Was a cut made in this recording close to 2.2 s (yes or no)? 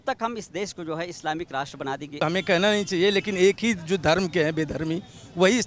yes